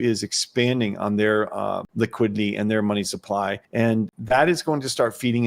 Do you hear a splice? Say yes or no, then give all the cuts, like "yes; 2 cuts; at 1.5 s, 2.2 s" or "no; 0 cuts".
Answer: yes; 2 cuts; at 1.8 s, 3.9 s